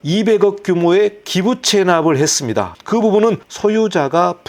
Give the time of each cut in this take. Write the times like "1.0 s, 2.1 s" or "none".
2.8 s